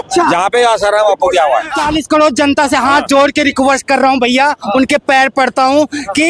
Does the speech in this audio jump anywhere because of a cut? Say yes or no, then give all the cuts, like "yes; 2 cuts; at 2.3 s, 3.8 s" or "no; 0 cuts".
yes; 1 cut; at 1.8 s